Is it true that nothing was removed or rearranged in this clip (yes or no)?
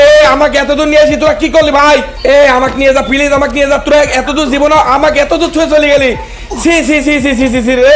no